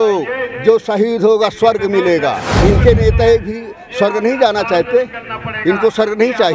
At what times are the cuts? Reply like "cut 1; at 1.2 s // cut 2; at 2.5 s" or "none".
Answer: cut 1; at 2.5 s